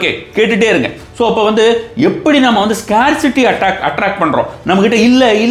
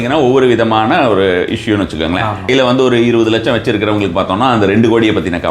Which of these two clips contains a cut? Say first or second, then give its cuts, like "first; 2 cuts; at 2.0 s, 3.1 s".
second; 1 cut; at 2.5 s